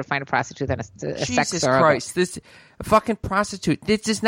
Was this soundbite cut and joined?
no; 0 cuts

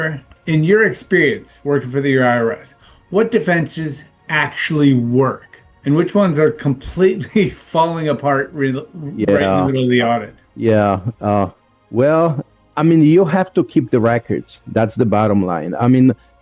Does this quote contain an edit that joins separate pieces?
no; 0 cuts

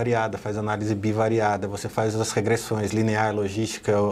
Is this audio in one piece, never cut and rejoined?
yes; 0 cuts

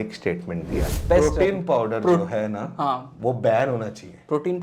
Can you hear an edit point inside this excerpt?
yes; 1 cut; at 1.0 s

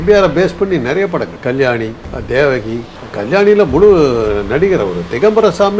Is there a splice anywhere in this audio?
yes; 2 cuts; at 1.3 s, 2.1 s

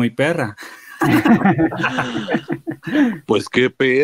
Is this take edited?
no; 0 cuts

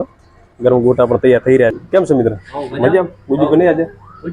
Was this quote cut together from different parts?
yes; 1 cut; at 1.7 s

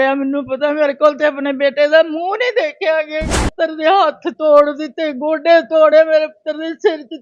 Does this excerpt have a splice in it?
yes; 1 cut; at 3.5 s

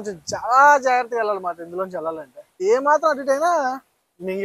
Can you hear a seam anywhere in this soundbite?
yes; 1 cut; at 2.6 s

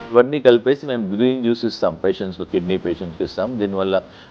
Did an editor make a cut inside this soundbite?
no; 0 cuts

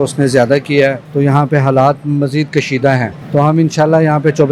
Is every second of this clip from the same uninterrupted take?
no; 2 cuts; at 1.0 s, 3.2 s

